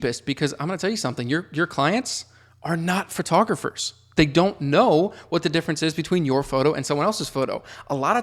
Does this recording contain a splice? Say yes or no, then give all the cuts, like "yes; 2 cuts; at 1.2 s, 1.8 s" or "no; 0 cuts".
no; 0 cuts